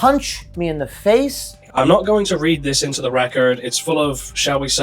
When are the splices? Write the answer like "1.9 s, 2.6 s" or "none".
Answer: 1.6 s